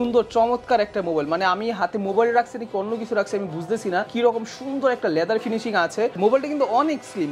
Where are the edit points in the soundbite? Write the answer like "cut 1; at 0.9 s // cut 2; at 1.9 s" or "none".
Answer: cut 1; at 4.1 s